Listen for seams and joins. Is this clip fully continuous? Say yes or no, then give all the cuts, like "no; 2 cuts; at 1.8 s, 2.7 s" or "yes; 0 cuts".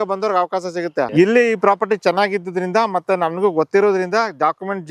no; 1 cut; at 1.1 s